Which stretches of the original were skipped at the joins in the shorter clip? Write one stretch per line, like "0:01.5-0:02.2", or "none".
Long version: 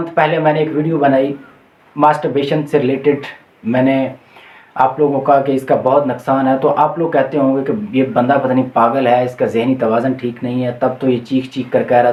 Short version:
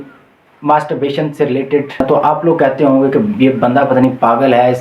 0:03.4-0:06.6

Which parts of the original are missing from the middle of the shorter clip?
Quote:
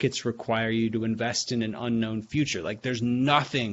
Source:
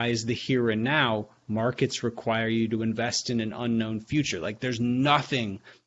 none

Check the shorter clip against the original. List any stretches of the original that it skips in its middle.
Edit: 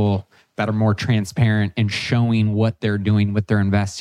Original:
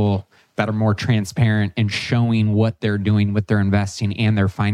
none

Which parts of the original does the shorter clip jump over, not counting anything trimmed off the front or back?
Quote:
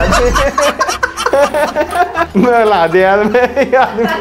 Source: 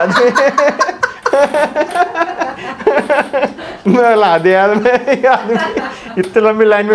0:02.3-0:03.8

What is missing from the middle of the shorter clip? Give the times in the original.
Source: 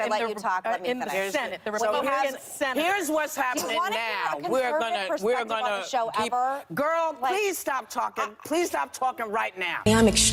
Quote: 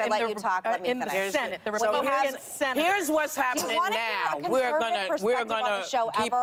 none

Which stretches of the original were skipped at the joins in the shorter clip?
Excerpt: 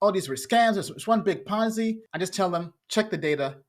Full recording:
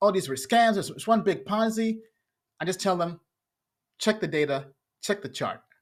0:02.1-0:02.5
0:03.2-0:03.9

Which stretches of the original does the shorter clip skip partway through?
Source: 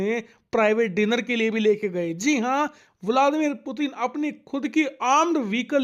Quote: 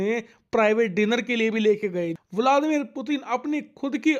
0:02.1-0:02.8

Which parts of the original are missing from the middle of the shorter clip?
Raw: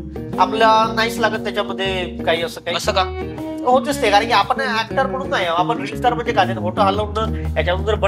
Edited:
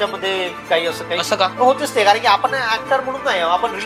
0:03.1-0:03.6

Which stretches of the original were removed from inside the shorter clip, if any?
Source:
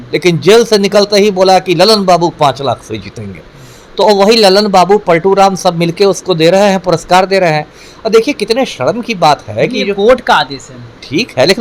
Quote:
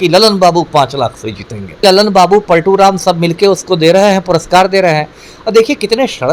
0:03.5-0:04.4

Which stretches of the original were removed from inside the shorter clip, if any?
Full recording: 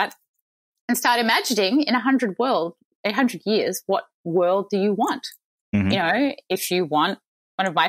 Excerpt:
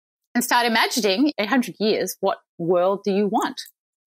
0:01.9-0:03.0

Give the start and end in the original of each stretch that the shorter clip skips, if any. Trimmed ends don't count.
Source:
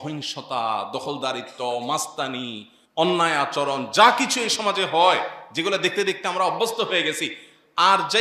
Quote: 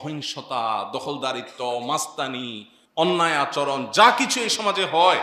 none

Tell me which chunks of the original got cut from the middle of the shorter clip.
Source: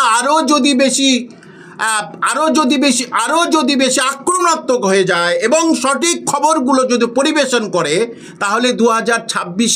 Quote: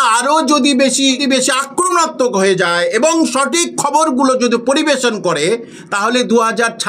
0:01.2-0:03.7

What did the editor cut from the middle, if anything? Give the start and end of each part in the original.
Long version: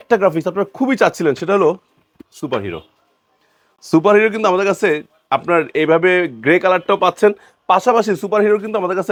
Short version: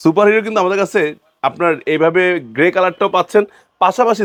none

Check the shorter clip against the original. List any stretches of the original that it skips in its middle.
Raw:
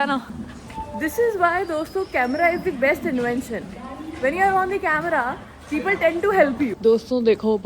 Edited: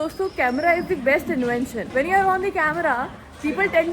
0:03.6-0:04.1

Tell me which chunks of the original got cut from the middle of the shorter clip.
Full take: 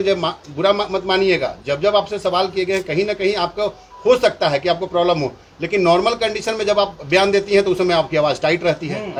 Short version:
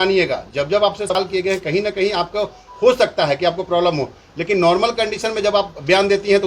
0:02.2-0:02.3

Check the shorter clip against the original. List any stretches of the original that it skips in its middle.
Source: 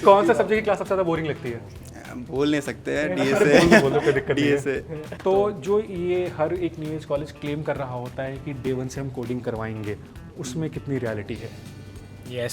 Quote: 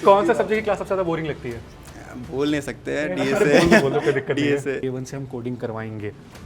0:04.8-0:08.6

